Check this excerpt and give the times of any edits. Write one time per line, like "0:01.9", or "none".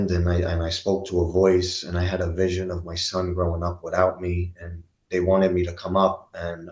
none